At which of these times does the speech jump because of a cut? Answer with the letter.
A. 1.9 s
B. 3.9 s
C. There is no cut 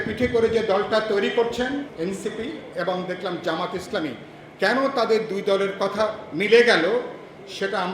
A